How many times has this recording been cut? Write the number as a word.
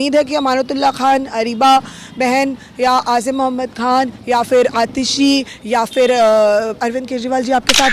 zero